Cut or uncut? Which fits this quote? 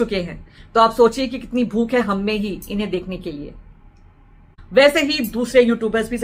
uncut